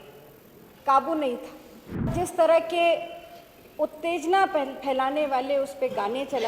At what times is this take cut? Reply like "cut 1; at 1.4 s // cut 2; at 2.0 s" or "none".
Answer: cut 1; at 2.1 s